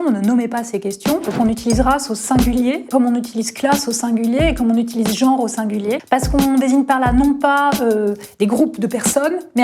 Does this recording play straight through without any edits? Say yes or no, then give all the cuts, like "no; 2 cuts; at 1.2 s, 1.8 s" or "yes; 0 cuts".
no; 3 cuts; at 1.3 s, 2.9 s, 6.0 s